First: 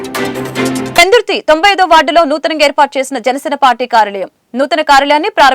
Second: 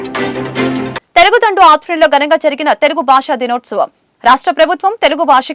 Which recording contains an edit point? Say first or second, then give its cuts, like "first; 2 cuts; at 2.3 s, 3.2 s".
first; 1 cut; at 0.9 s